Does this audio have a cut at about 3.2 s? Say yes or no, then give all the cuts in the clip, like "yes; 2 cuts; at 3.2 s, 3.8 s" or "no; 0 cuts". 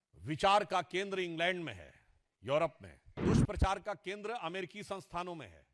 yes; 1 cut; at 3.2 s